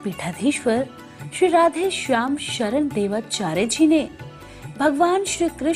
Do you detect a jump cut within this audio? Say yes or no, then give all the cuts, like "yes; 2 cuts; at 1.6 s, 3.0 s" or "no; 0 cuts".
no; 0 cuts